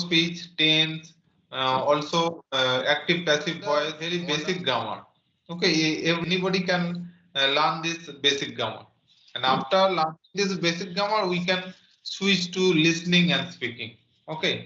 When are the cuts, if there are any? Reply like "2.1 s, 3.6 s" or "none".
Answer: 4.0 s, 6.2 s